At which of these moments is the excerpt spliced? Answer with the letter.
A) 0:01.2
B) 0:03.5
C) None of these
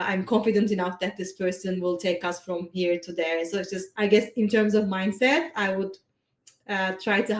C